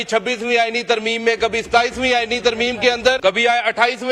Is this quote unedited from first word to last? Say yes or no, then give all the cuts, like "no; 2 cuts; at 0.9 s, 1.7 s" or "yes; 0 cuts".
no; 1 cut; at 3.2 s